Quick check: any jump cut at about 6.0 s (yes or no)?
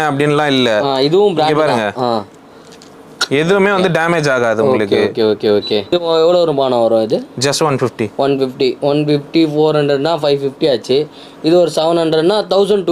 yes